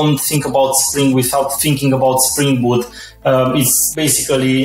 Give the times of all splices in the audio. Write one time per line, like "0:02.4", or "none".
0:01.6
0:03.0
0:03.8

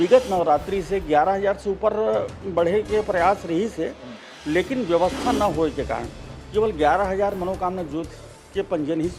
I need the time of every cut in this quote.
none

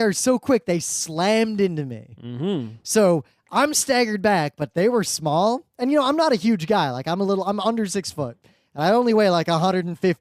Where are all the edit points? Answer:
0:08.3

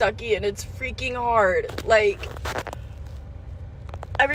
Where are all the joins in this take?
none

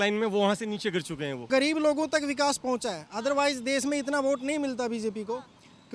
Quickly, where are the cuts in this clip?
0:01.4

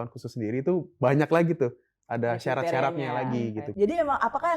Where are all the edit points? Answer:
0:03.7

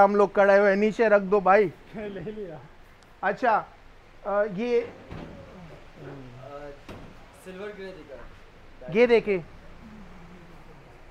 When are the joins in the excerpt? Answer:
none

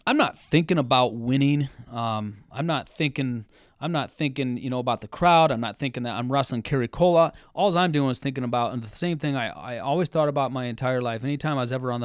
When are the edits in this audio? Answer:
none

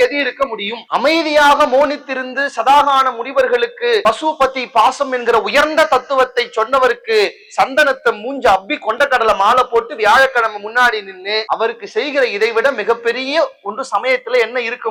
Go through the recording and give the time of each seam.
none

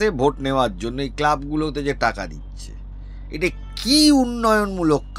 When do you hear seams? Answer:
none

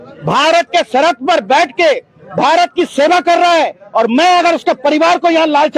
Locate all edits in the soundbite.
none

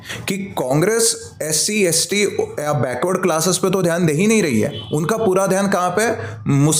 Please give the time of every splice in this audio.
none

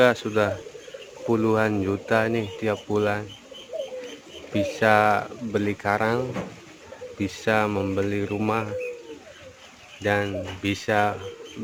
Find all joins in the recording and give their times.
none

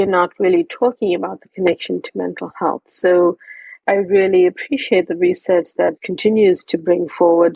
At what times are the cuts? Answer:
0:03.8
0:06.1

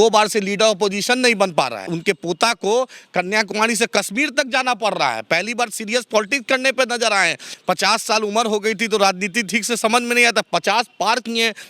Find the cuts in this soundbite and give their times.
0:01.9
0:07.5

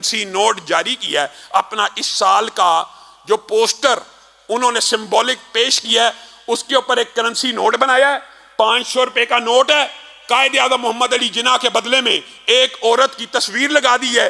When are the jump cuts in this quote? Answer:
none

